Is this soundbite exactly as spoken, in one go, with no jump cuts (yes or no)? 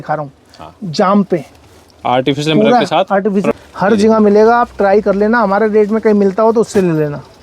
no